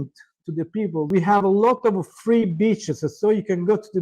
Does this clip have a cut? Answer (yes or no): yes